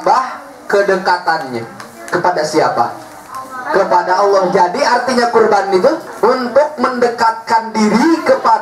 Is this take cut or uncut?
cut